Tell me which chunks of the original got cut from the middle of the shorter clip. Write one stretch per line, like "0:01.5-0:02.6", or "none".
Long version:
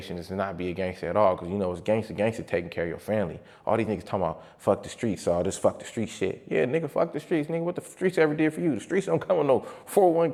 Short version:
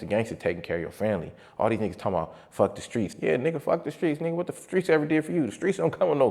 0:05.2-0:06.4